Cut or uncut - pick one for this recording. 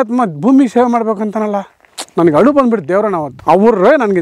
cut